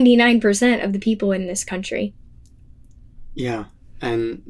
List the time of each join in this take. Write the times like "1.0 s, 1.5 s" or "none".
none